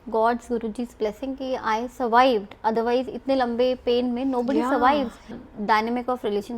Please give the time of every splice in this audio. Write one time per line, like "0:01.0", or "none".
0:05.4